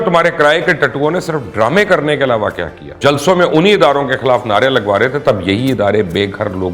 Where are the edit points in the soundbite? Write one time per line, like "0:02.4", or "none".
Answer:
0:03.0